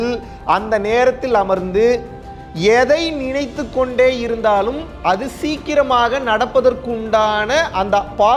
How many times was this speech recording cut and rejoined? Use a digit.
0